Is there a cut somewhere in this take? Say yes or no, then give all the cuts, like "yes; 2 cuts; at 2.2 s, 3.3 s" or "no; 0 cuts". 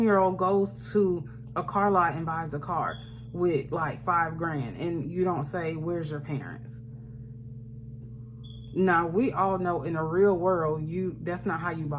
no; 0 cuts